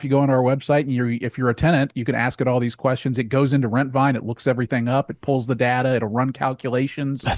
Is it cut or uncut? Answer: uncut